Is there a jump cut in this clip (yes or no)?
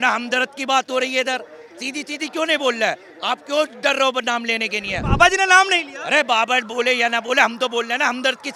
no